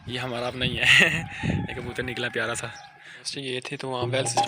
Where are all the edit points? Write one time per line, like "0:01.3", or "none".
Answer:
0:03.3